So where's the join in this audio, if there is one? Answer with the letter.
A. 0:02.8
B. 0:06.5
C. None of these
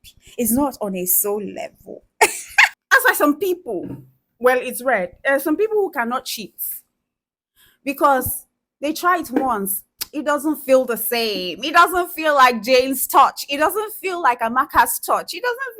A